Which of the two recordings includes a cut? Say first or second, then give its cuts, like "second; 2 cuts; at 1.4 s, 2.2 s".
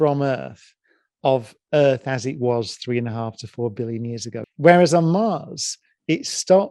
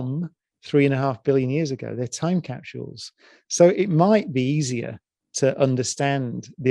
first; 1 cut; at 4.5 s